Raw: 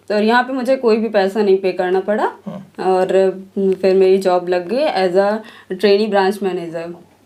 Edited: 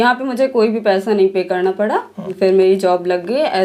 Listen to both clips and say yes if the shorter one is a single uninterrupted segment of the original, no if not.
no